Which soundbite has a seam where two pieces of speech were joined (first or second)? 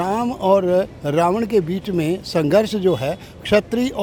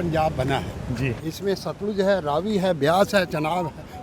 second